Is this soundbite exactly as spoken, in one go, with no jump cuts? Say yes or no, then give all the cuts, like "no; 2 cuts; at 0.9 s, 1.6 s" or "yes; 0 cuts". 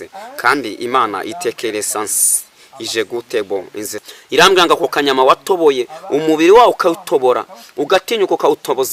no; 1 cut; at 4.0 s